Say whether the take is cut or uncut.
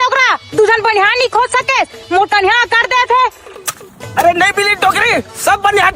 uncut